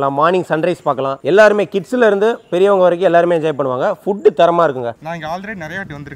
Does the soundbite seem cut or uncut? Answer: cut